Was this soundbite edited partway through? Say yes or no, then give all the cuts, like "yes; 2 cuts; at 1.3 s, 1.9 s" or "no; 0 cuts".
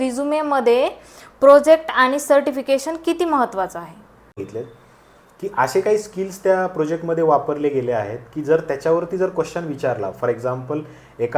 yes; 1 cut; at 4.4 s